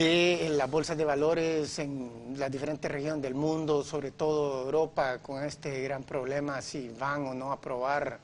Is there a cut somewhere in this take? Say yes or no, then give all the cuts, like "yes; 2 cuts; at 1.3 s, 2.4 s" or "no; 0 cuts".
no; 0 cuts